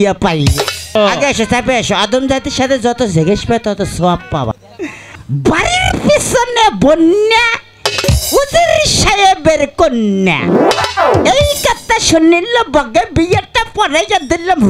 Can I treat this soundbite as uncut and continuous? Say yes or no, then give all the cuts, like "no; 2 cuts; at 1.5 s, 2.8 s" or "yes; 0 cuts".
no; 2 cuts; at 0.9 s, 5.2 s